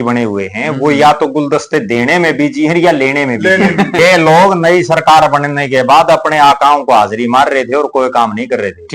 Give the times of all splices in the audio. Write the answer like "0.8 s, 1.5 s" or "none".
4.0 s